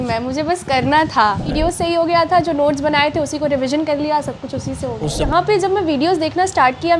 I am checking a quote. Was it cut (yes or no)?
yes